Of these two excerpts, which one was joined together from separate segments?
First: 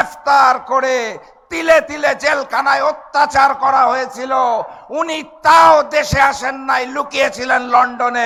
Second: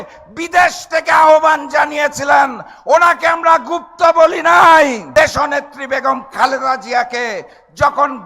second; 1 cut; at 5.0 s

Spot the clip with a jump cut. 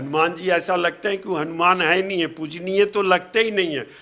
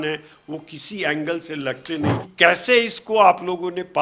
second; 1 cut; at 2.2 s

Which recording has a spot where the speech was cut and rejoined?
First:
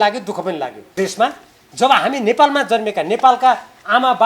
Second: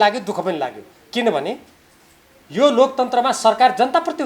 first; 1 cut; at 1.0 s

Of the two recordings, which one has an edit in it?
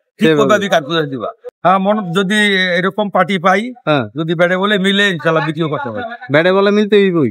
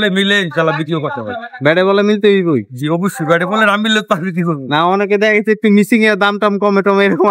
first; 1 cut; at 1.5 s

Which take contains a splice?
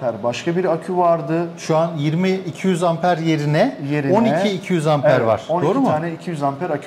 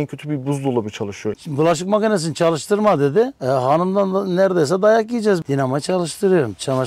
second; 2 cuts; at 1.3 s, 5.4 s

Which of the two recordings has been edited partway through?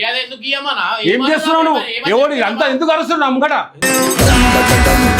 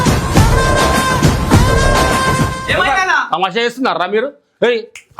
second; 1 cut; at 2.6 s

